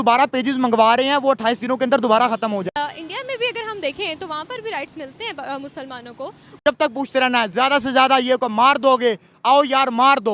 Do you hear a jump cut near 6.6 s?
yes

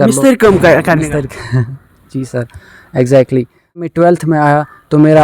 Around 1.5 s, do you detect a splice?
no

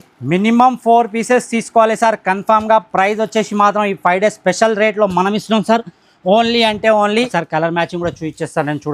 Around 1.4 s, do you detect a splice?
no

